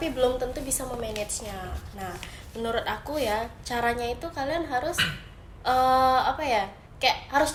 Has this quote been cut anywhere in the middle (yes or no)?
no